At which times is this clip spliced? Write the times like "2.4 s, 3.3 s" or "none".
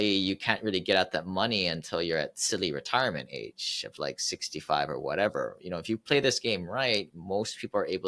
none